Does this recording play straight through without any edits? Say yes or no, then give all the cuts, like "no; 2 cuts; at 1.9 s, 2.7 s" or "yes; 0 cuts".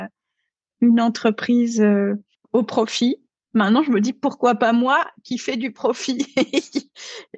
no; 2 cuts; at 2.3 s, 3.3 s